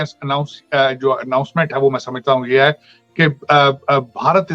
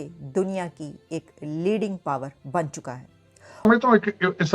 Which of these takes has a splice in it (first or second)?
second